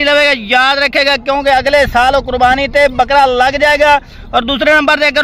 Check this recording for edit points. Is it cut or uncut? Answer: uncut